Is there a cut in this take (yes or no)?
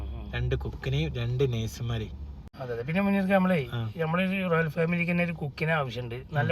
yes